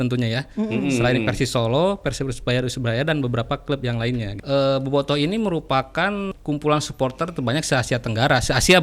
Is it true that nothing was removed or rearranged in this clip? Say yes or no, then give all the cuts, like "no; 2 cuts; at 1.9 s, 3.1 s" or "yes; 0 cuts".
no; 2 cuts; at 4.3 s, 6.3 s